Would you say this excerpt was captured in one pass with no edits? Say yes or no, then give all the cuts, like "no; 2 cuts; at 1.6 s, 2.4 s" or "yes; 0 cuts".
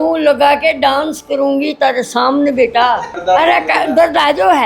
no; 1 cut; at 3.1 s